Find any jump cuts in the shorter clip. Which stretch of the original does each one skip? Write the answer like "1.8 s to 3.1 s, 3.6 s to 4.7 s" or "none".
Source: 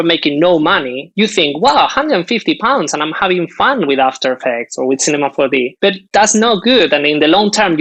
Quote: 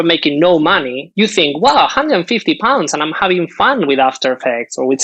none